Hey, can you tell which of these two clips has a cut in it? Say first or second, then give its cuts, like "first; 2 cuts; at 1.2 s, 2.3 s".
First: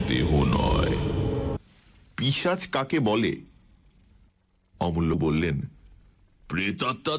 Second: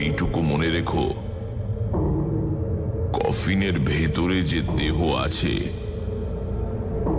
first; 1 cut; at 1.6 s